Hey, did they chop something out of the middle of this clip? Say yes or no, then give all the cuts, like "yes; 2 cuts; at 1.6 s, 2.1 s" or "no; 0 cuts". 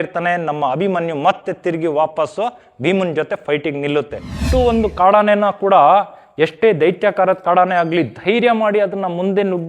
yes; 1 cut; at 4.4 s